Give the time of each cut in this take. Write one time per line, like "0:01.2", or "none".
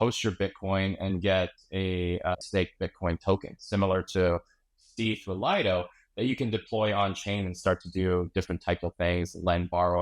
0:02.3